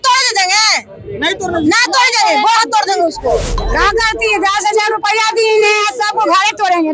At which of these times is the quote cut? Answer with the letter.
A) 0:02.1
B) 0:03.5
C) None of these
B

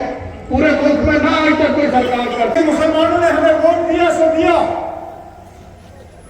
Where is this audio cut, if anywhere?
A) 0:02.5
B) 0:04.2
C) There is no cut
A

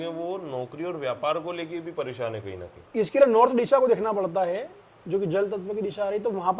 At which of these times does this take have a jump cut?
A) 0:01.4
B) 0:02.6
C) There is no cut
C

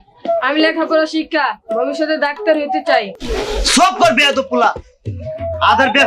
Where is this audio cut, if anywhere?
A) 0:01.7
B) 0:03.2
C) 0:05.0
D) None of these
B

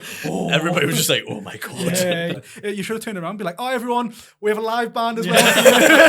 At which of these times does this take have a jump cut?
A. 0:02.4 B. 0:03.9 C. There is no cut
A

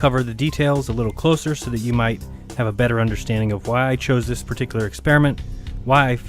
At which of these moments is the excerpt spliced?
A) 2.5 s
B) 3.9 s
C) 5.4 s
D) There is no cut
C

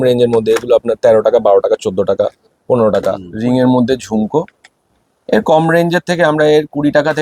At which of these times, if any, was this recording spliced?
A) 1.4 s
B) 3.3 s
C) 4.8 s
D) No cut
B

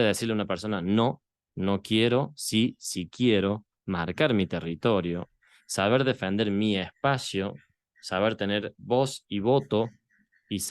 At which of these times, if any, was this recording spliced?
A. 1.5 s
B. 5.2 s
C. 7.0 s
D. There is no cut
D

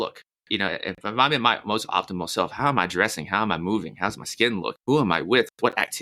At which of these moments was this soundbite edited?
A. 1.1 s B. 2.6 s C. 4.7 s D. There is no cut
C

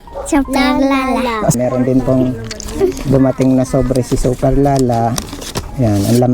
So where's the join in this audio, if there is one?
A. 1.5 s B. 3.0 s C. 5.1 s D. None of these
A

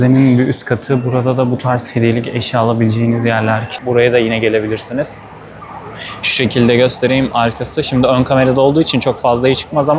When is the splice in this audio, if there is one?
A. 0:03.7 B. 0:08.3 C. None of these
A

